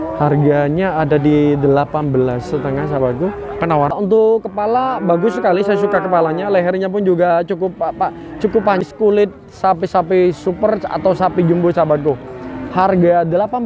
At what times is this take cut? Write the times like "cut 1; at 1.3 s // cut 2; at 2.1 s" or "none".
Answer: cut 1; at 3.9 s // cut 2; at 8.8 s